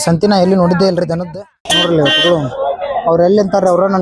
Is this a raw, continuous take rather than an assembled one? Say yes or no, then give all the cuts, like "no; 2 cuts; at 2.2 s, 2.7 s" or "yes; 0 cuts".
no; 1 cut; at 1.2 s